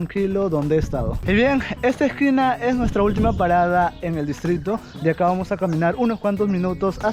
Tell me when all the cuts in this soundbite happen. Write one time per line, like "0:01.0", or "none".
0:01.1